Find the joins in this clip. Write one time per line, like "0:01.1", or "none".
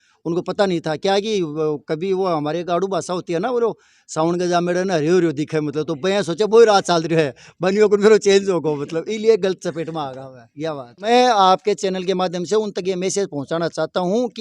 0:11.1